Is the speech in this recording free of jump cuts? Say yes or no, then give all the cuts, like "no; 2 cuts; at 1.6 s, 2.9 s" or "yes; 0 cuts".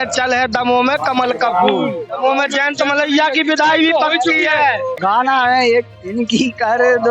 no; 2 cuts; at 2.5 s, 5.1 s